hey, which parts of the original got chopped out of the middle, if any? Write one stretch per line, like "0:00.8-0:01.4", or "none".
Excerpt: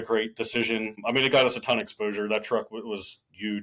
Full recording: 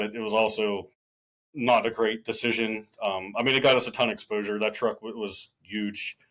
0:02.8-0:03.3